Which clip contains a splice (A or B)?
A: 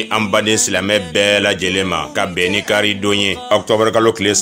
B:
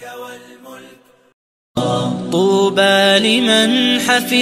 B